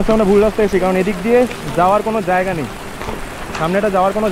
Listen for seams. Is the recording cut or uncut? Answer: uncut